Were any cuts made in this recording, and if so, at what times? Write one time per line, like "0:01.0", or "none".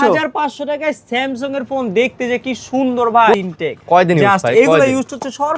0:03.3